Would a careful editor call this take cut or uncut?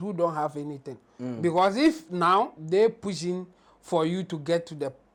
uncut